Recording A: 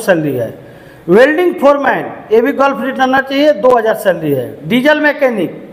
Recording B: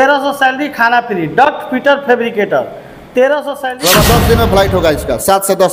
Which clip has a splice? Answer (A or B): B